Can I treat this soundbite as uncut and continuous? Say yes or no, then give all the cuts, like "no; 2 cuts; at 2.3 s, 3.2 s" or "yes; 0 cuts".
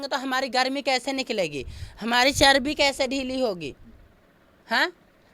yes; 0 cuts